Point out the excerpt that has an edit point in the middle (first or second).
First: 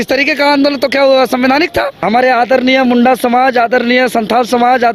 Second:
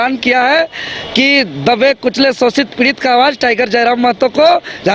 first